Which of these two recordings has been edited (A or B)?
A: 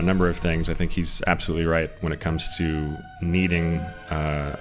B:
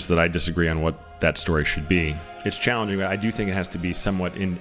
B